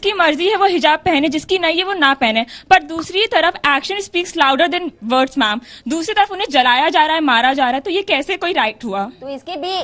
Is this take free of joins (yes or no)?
yes